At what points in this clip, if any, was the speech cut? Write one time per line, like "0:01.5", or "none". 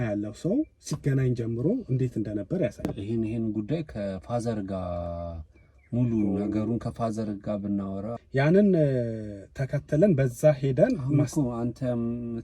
0:02.9
0:08.1